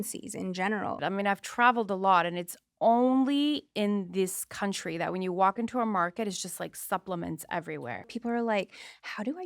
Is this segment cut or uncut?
cut